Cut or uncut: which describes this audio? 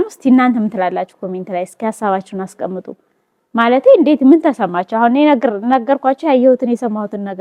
uncut